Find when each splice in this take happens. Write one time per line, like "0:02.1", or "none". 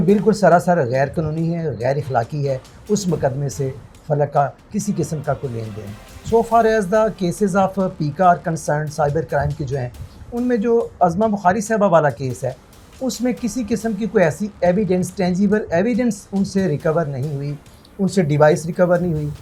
none